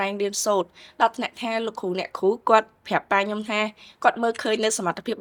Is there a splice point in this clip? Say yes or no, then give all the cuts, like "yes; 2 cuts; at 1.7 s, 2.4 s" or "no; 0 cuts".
no; 0 cuts